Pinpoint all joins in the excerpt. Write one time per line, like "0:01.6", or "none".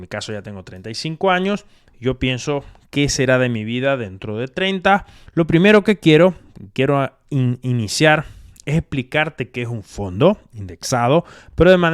0:05.2